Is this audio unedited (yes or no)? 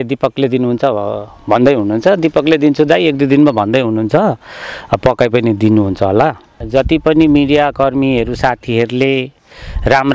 no